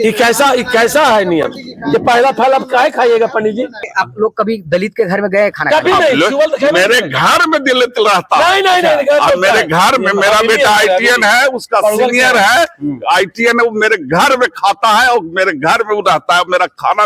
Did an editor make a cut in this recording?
yes; 1 cut; at 3.9 s

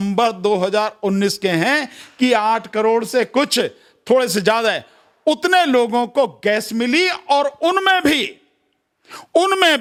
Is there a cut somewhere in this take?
no; 0 cuts

